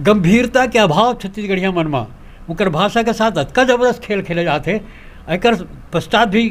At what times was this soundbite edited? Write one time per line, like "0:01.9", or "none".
none

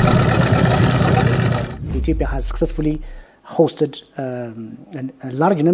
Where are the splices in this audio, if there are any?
0:02.0

